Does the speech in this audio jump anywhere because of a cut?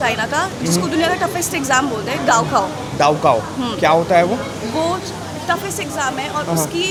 no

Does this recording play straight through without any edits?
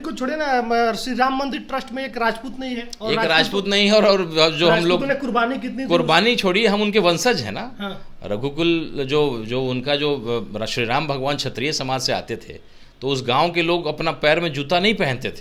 yes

